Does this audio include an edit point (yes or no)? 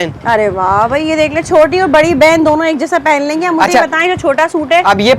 no